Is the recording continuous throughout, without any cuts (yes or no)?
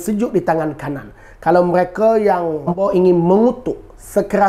no